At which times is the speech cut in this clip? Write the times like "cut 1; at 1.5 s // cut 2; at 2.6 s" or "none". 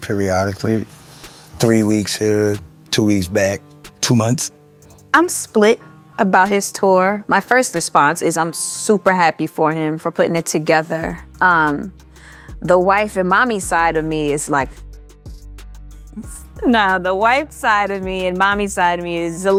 none